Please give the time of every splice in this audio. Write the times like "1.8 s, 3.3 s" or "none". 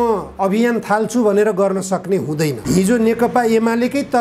2.6 s